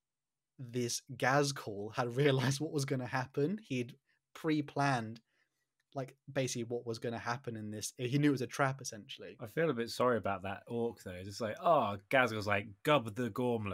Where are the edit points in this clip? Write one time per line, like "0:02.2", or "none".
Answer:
0:09.4

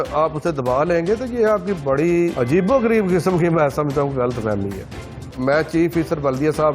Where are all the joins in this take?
0:02.3
0:05.3

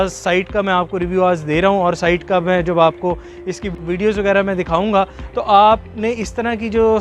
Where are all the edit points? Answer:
none

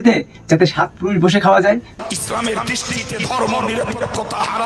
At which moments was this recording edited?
0:01.9

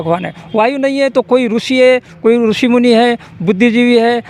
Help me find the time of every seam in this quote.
none

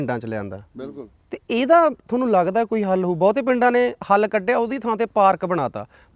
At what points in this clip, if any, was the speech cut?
none

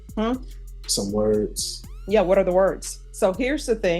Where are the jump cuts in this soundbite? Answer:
0:03.0

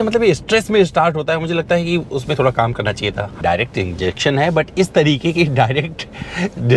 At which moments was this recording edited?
0:03.3

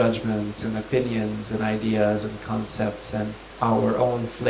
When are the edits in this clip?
0:03.4

